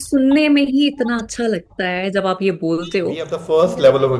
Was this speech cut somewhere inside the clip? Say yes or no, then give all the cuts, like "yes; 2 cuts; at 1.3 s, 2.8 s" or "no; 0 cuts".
yes; 1 cut; at 3.3 s